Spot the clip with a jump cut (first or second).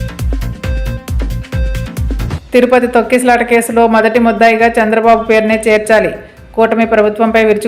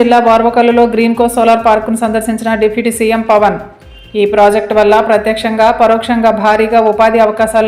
first